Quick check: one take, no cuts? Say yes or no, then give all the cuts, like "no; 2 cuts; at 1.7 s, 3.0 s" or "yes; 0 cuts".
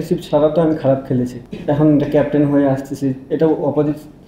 no; 1 cut; at 1.5 s